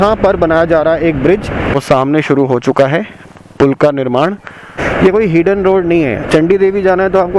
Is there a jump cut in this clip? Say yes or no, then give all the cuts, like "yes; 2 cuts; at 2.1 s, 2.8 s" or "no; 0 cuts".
yes; 2 cuts; at 1.7 s, 4.8 s